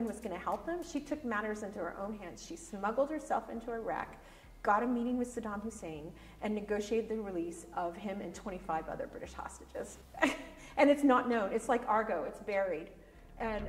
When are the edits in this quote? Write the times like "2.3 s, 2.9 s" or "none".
none